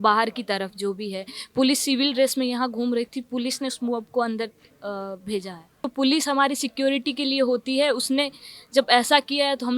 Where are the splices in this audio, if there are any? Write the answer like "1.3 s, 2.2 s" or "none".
5.8 s